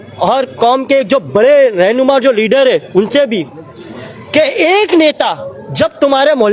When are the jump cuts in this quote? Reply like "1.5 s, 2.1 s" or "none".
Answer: none